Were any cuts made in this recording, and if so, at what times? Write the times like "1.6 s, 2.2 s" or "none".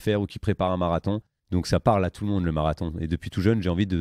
1.3 s